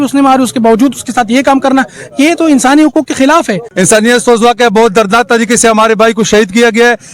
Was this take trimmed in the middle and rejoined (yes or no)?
yes